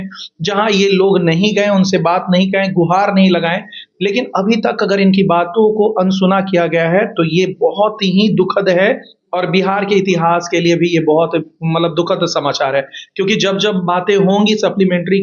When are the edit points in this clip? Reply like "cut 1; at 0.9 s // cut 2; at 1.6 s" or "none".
none